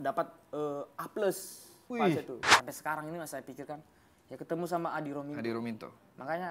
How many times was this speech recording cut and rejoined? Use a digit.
1